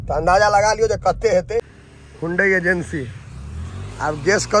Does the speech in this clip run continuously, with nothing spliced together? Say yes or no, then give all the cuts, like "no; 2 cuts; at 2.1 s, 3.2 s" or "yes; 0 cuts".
no; 1 cut; at 1.7 s